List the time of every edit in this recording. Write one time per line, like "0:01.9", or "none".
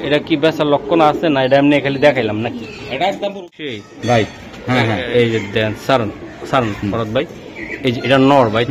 0:03.7

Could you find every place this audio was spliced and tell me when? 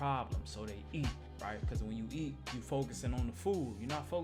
none

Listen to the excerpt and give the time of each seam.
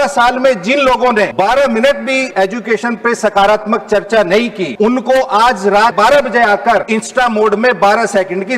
0:01.3
0:02.3
0:04.6
0:05.9
0:06.9

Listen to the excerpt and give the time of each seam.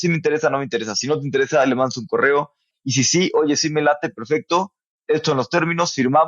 0:02.7
0:04.9

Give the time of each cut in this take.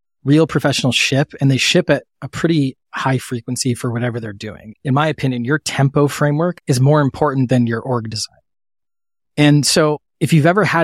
0:04.6
0:06.6

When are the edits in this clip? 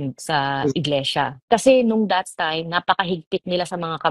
0:01.4

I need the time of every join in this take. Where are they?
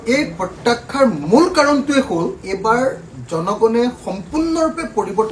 0:02.4

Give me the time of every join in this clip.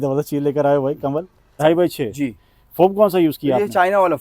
0:01.5

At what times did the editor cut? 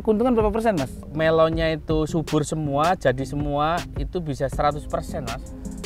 0:01.1

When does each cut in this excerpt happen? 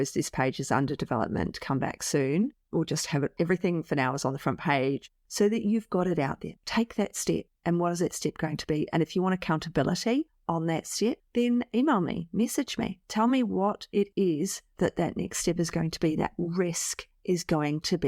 0:05.0
0:06.5

